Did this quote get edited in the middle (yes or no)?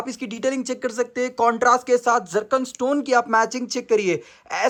no